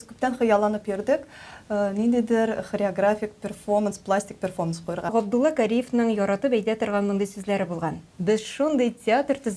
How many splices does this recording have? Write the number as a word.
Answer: one